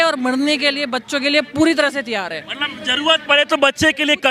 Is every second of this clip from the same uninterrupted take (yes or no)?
yes